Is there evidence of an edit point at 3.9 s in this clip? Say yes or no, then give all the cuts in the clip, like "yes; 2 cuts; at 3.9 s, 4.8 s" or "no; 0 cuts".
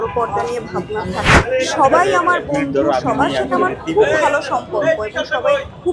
no; 1 cut; at 1.3 s